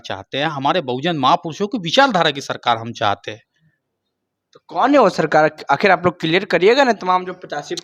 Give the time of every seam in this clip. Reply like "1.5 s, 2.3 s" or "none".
none